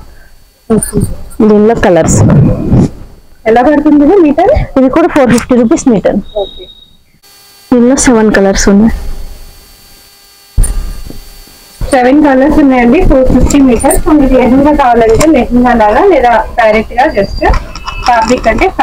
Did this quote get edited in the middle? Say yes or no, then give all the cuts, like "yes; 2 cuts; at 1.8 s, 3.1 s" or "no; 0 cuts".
no; 0 cuts